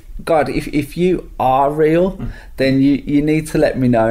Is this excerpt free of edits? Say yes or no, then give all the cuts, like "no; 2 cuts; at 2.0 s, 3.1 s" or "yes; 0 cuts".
yes; 0 cuts